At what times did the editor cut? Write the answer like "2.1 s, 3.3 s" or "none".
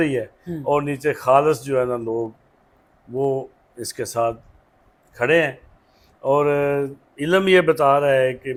none